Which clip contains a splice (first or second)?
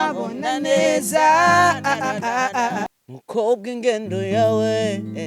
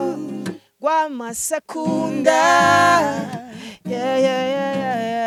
first